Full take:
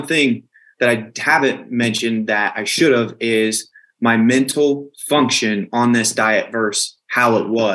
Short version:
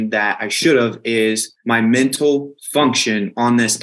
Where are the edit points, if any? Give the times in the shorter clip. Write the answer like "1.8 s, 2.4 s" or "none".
1.5 s